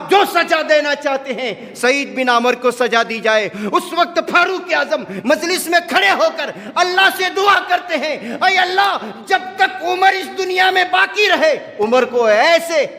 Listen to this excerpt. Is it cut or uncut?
uncut